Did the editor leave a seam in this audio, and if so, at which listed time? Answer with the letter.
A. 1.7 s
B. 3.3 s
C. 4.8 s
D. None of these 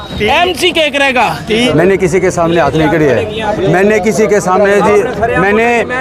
A